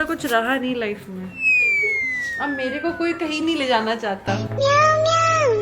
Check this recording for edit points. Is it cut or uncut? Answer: uncut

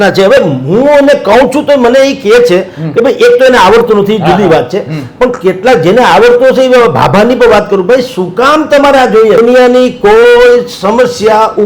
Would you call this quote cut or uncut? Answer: cut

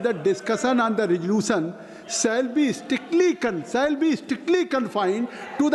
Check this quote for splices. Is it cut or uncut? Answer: uncut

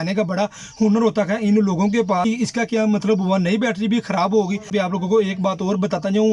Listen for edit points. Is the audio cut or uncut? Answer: cut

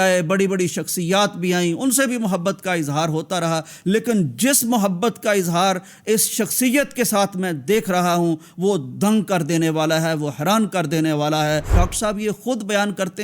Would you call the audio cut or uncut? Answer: cut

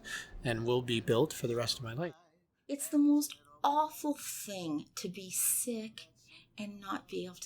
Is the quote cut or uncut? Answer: cut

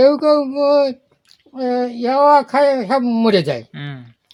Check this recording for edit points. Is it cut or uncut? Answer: uncut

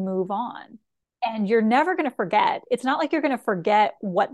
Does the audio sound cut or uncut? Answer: cut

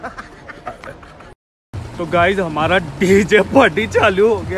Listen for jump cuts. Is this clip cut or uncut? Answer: cut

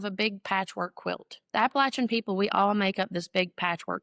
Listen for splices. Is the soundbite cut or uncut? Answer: cut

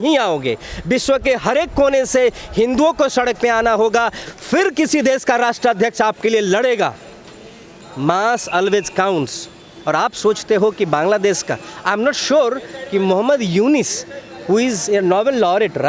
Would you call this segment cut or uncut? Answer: uncut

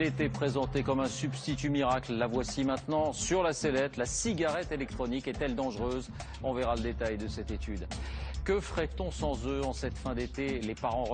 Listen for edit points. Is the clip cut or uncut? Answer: uncut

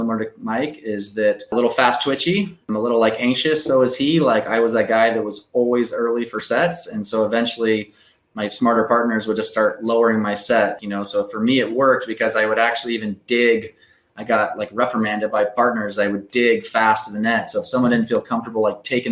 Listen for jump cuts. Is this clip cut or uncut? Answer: cut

